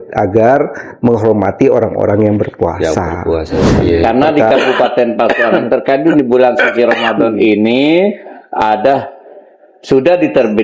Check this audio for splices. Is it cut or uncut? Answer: cut